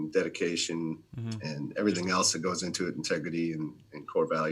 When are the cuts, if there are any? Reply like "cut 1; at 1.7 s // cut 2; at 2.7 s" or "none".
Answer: none